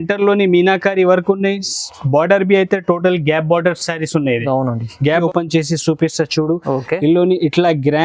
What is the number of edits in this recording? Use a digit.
1